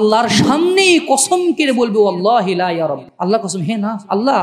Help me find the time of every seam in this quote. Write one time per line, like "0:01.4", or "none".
0:03.1